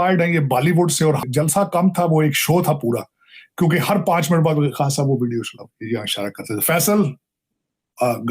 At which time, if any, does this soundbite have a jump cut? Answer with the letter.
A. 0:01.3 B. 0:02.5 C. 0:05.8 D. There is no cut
A